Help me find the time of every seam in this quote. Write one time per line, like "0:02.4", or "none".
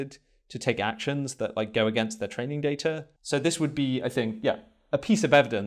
0:03.1